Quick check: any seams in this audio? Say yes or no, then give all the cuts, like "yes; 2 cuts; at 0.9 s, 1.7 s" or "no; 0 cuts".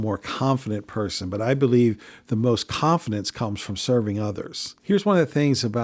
no; 0 cuts